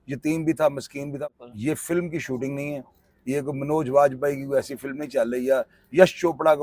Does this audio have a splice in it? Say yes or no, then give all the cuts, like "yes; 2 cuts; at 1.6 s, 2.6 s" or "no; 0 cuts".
yes; 1 cut; at 1.0 s